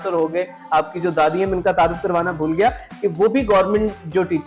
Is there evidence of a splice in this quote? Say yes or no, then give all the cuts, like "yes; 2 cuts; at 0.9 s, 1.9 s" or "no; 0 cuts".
no; 0 cuts